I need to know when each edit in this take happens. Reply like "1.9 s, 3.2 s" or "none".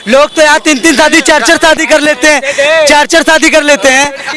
none